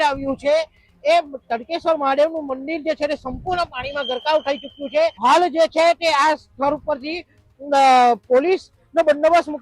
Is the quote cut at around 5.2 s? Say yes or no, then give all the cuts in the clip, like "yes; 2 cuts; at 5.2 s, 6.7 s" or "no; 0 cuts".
yes; 1 cut; at 5.2 s